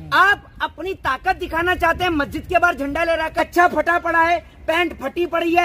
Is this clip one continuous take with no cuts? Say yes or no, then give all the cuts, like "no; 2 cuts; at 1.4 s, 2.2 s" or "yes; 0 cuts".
no; 1 cut; at 3.3 s